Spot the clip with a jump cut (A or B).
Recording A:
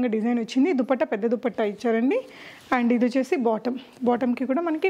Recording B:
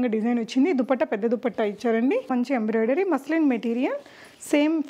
B